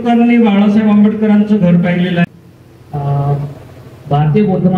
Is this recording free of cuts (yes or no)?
no